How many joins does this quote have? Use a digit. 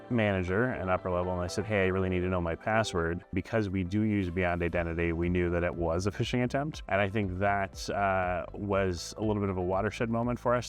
2